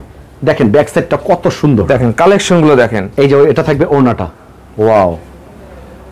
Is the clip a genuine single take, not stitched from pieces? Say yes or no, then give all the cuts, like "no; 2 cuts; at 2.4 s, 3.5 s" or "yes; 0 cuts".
yes; 0 cuts